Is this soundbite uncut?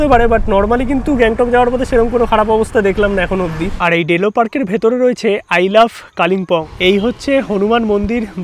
no; 2 cuts; at 3.7 s, 6.7 s

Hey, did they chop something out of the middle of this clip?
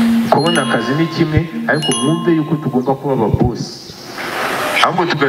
no; 0 cuts

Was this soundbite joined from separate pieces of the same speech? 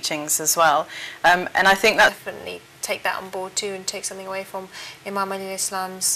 no; 0 cuts

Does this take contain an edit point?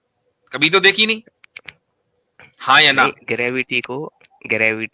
no; 0 cuts

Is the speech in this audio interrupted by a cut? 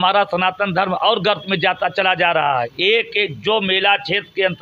yes; 1 cut; at 2.7 s

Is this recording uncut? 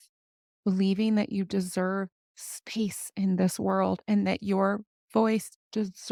yes; 0 cuts

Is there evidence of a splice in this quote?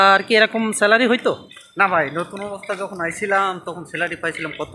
no; 0 cuts

